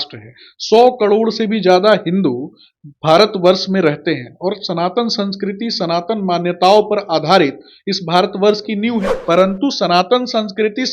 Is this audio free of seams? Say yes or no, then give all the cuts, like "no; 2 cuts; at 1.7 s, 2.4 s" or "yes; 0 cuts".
no; 1 cut; at 9.1 s